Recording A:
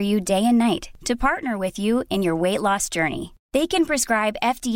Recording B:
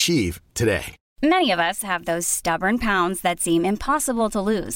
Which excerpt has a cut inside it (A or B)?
B